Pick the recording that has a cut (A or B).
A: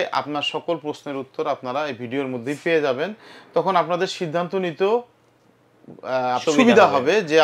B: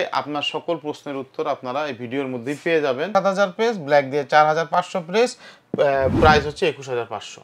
B